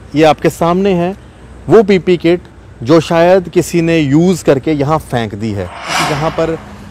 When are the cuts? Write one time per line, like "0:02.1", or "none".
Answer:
0:06.0